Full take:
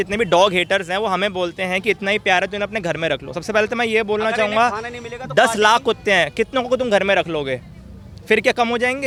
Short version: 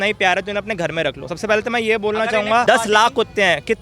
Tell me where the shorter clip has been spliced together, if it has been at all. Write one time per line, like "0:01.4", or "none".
0:02.6